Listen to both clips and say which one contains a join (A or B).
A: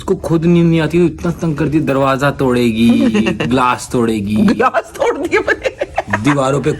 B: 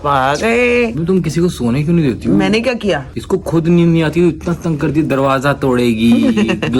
B